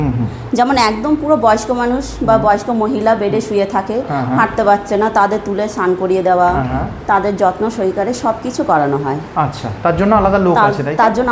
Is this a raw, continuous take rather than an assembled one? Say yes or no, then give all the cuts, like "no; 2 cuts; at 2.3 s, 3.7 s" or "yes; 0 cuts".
yes; 0 cuts